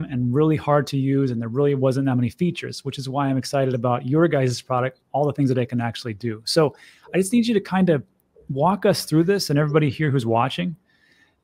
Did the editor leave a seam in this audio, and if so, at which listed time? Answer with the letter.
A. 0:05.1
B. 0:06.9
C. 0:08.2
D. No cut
D